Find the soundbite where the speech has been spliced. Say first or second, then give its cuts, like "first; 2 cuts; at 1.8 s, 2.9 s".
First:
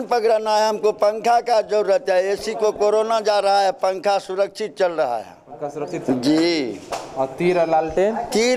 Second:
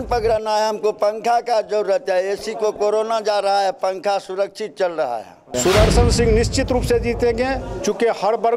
second; 1 cut; at 5.5 s